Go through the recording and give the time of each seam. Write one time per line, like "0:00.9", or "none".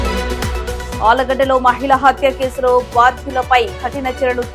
none